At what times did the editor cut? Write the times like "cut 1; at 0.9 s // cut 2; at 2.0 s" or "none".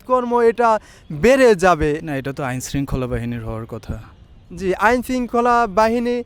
cut 1; at 2.0 s